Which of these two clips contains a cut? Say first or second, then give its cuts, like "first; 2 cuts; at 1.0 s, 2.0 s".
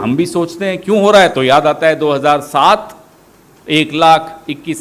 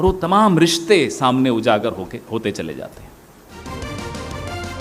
second; 1 cut; at 3.5 s